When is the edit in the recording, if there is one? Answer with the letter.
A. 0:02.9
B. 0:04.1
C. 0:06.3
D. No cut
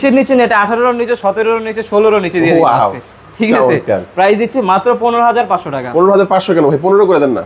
D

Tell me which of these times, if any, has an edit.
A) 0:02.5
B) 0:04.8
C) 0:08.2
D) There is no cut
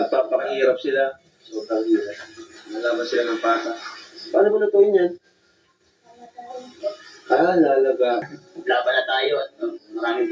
C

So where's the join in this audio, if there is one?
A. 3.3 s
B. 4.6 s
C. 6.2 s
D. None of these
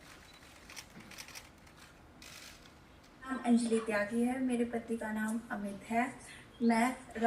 A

